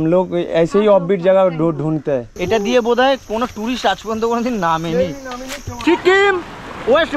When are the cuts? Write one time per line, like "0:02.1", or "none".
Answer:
0:02.3
0:05.8